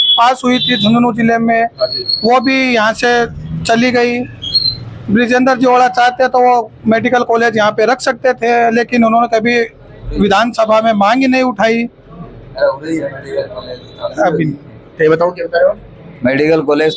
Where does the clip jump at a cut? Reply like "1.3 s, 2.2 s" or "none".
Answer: none